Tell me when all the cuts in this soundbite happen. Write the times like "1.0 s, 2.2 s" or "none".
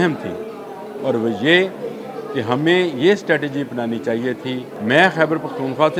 4.7 s